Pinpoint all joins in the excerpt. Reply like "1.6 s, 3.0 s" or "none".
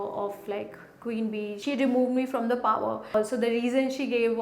1.6 s, 3.1 s